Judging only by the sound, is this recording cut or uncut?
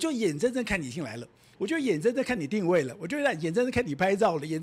uncut